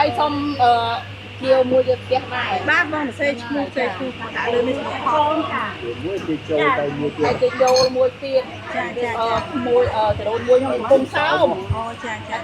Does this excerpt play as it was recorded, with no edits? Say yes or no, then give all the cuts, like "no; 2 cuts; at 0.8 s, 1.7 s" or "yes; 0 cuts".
yes; 0 cuts